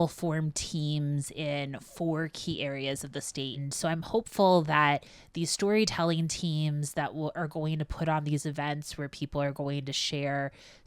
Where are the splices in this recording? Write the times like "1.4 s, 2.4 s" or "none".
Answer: 3.7 s